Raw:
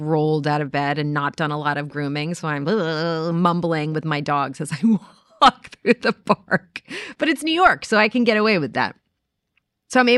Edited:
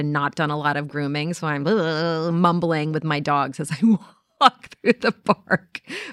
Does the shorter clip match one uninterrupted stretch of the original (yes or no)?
yes